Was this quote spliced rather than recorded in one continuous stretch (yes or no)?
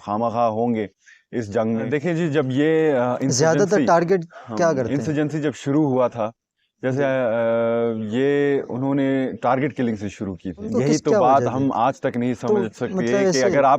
yes